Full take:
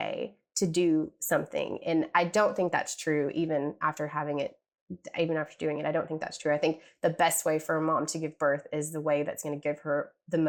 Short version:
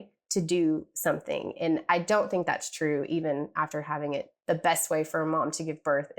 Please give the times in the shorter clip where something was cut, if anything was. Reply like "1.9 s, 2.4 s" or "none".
4.3 s